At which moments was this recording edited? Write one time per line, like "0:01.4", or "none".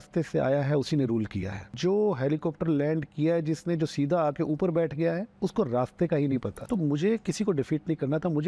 0:01.6
0:05.3
0:06.6